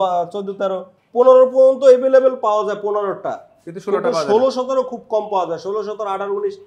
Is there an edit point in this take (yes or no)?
no